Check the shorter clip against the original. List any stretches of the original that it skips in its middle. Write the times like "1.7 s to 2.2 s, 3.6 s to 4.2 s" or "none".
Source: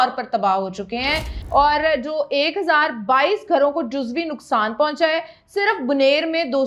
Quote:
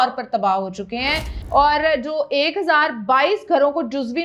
none